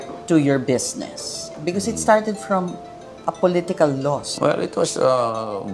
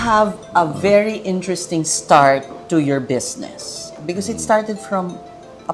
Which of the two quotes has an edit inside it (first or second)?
first